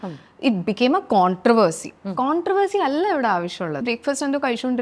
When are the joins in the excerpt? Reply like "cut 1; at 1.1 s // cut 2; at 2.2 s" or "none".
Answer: cut 1; at 3.8 s

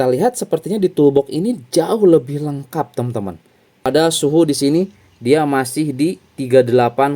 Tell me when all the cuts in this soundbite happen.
cut 1; at 3.8 s

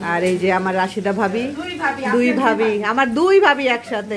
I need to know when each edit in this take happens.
none

